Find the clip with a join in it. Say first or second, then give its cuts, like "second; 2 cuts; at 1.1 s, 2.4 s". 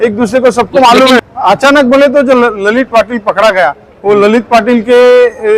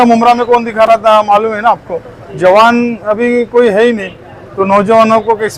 first; 1 cut; at 1.2 s